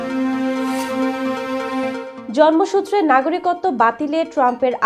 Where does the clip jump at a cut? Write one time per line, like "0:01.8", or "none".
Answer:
none